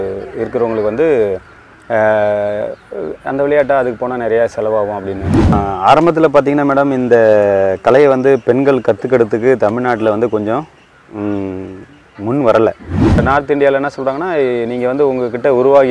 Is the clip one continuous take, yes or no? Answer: no